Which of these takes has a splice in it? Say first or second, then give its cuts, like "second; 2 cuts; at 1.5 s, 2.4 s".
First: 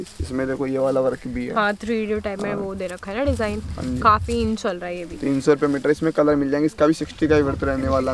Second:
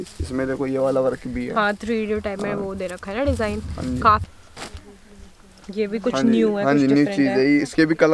second; 1 cut; at 4.3 s